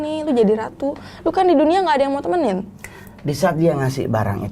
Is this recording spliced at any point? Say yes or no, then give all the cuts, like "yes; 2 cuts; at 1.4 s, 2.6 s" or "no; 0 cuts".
no; 0 cuts